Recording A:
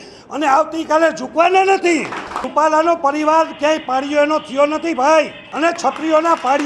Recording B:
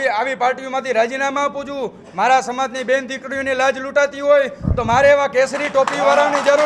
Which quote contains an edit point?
A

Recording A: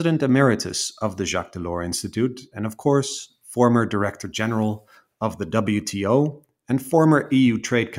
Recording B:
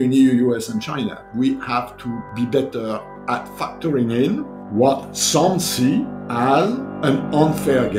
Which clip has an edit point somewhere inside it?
B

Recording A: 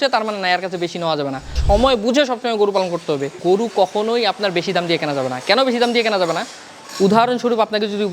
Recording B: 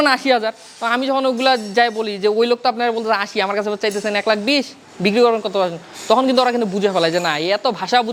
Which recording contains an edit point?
A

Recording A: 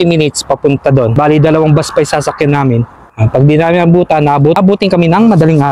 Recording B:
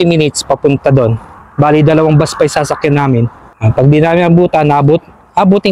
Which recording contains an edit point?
A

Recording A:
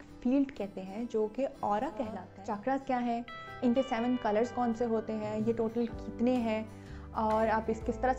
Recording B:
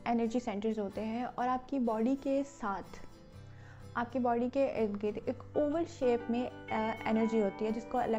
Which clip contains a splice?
A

